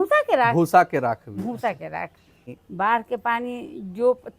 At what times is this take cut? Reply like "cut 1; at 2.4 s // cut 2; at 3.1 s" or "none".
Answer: cut 1; at 2.5 s

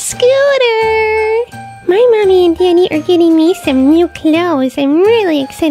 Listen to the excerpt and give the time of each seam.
none

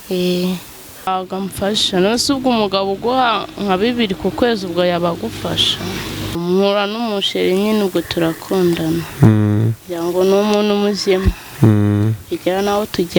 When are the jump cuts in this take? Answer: cut 1; at 1.1 s // cut 2; at 6.4 s

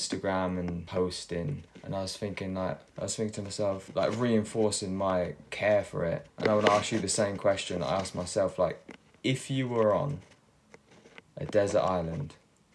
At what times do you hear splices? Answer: cut 1; at 0.8 s // cut 2; at 1.7 s // cut 3; at 2.9 s // cut 4; at 3.9 s // cut 5; at 6.3 s

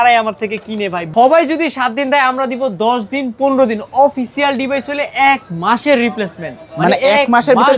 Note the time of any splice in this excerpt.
cut 1; at 1.1 s

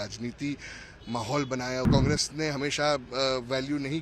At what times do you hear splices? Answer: cut 1; at 1.9 s

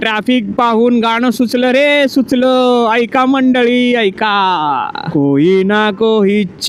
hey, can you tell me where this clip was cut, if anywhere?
cut 1; at 5.0 s

